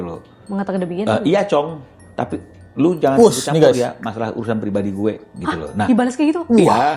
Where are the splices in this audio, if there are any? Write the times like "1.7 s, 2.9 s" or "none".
none